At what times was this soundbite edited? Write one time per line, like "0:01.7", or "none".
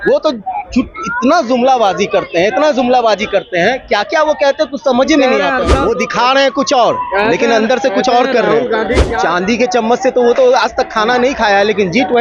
0:05.7
0:09.0